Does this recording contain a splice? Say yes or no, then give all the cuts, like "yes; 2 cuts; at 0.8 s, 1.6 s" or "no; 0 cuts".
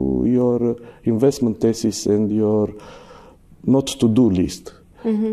no; 0 cuts